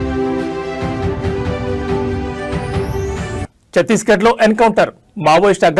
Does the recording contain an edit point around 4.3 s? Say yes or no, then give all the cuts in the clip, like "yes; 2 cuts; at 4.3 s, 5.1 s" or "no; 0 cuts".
no; 1 cut; at 2.9 s